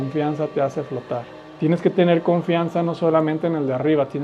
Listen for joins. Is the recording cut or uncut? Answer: cut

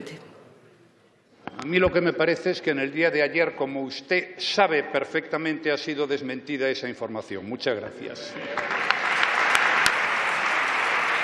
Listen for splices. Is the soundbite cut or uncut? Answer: cut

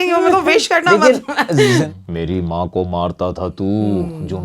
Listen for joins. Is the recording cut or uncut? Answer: cut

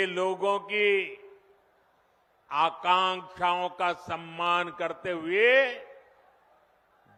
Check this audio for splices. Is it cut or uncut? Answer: uncut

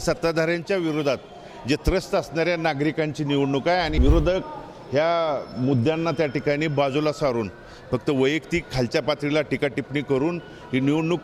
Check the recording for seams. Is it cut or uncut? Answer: cut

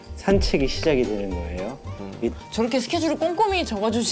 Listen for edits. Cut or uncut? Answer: uncut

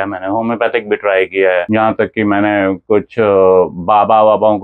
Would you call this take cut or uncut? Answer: uncut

